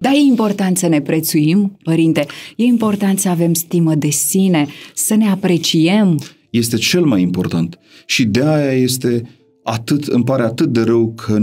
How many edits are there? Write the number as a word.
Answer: zero